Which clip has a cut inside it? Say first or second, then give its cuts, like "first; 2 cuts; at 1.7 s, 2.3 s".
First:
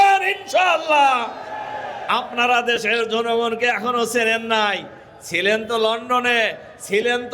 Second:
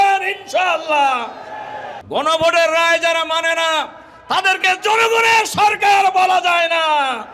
second; 1 cut; at 1.9 s